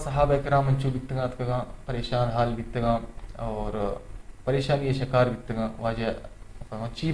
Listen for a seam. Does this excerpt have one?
no; 0 cuts

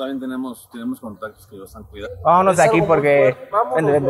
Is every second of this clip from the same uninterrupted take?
no; 1 cut; at 2.0 s

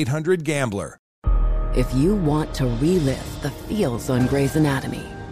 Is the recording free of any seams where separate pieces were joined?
no; 1 cut; at 1.2 s

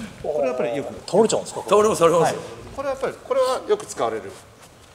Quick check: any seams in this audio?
no; 0 cuts

